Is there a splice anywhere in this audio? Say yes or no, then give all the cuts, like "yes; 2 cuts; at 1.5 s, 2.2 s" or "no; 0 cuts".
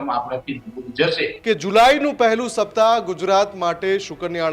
yes; 1 cut; at 1.4 s